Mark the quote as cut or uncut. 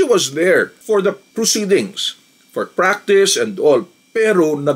uncut